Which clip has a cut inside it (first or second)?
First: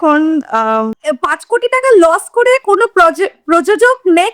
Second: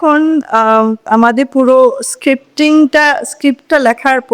first